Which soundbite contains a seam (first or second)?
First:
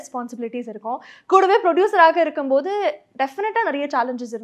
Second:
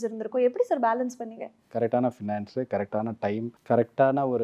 second